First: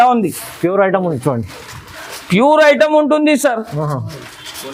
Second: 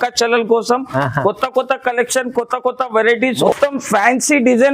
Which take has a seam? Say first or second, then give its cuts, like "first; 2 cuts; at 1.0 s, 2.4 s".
second; 1 cut; at 3.4 s